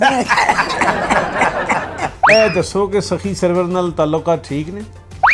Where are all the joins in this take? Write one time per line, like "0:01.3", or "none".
0:02.1

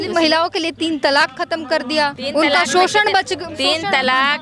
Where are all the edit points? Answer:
0:02.2

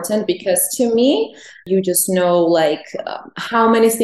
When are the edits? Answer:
0:01.6

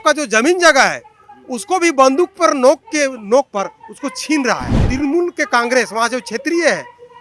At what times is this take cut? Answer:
0:04.9

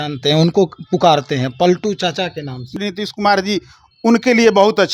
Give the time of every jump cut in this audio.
0:02.8

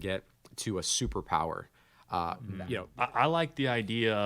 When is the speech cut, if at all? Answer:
0:02.8

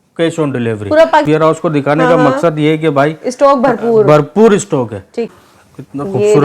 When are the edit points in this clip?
0:01.2
0:05.3

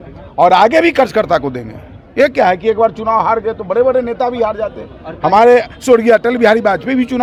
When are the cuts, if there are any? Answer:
none

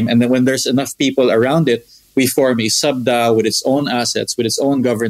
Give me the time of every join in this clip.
none

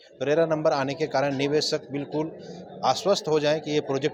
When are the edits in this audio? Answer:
none

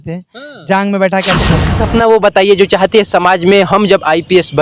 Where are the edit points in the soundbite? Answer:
0:01.8

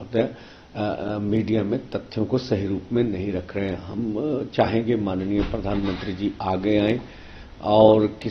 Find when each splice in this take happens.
none

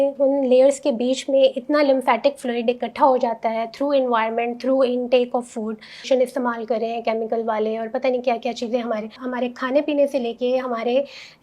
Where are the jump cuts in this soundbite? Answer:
0:06.0
0:09.2

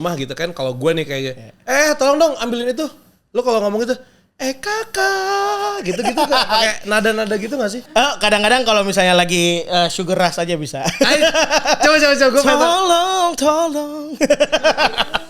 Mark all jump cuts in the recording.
0:07.8

